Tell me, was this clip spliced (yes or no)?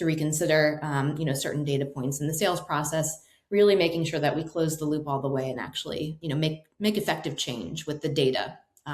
yes